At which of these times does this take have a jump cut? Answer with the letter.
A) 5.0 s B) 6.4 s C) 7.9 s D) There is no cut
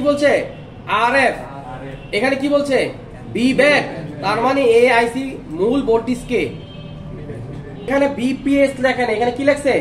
C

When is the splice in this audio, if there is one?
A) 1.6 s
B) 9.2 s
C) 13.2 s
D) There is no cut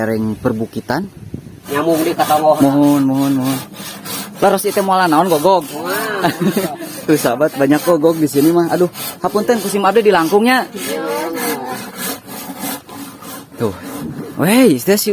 A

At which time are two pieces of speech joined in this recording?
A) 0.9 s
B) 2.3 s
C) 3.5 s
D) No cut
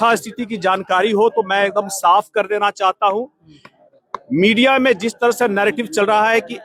D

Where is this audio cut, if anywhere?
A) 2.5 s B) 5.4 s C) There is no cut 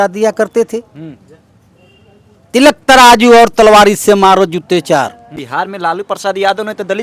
B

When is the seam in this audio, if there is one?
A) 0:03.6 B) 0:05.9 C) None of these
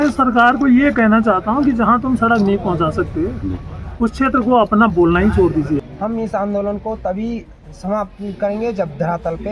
B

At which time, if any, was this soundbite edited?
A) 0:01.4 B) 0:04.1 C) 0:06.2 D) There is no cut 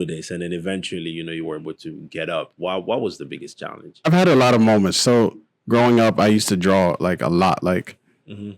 B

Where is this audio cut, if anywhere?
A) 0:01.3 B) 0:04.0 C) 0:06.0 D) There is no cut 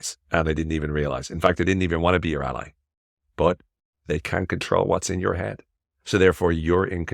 B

